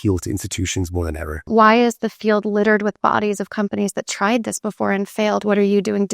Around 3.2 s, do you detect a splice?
no; 1 cut; at 1.4 s

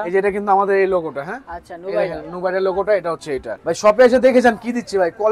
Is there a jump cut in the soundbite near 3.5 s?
yes; 1 cut; at 3.5 s

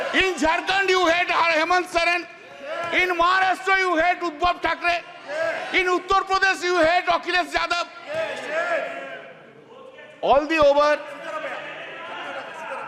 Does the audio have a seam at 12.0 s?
no; 0 cuts

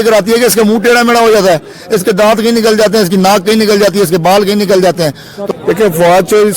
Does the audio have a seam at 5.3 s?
yes; 1 cut; at 5.3 s

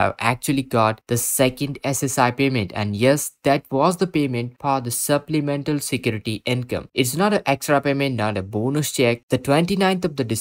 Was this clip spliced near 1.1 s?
no; 0 cuts

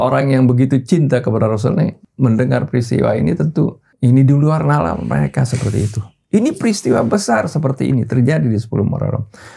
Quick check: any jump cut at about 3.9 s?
yes; 2 cuts; at 2.0 s, 3.9 s

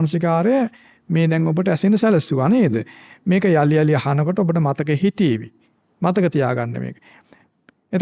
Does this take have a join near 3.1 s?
no; 0 cuts

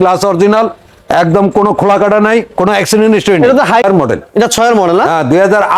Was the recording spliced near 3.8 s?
yes; 1 cut; at 3.8 s

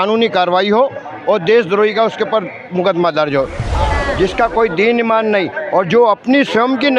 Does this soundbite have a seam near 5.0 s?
no; 1 cut; at 3.6 s

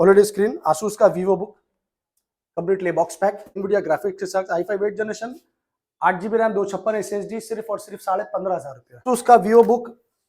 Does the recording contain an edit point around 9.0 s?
yes; 2 cuts; at 3.6 s, 9.0 s

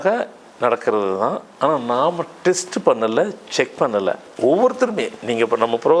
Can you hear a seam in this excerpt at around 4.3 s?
yes; 1 cut; at 4.3 s

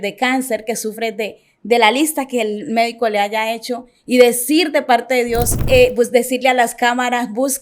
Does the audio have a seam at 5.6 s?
yes; 1 cut; at 5.6 s

